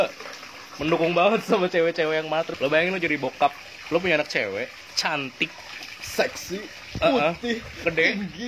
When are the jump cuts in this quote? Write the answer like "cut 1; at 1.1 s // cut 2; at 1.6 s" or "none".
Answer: cut 1; at 2.5 s